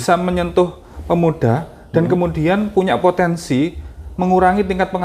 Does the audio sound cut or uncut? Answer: uncut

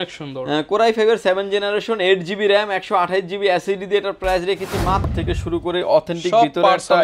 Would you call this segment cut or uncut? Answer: cut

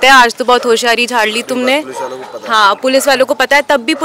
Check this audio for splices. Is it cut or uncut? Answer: uncut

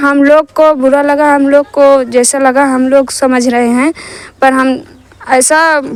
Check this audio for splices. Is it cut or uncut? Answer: uncut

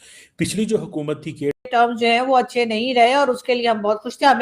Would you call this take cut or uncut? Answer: cut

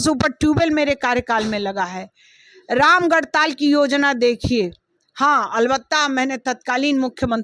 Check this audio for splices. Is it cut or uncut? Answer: uncut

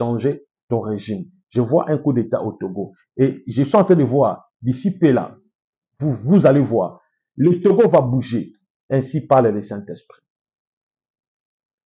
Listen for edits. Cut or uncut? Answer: uncut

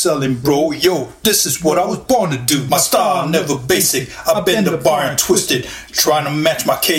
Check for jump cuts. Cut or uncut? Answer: cut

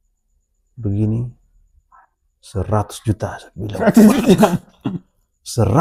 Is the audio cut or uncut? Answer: uncut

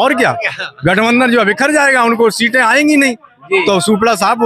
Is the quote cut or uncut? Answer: uncut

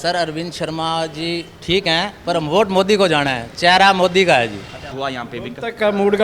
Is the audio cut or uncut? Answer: cut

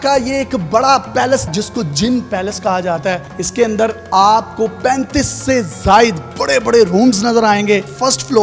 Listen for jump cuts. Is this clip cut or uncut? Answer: cut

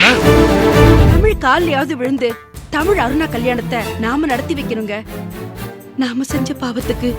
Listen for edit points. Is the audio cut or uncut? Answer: cut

